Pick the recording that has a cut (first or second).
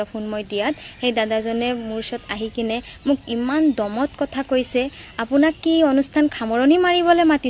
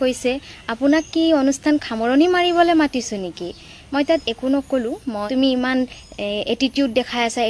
second